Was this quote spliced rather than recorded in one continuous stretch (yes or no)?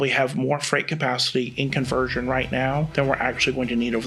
yes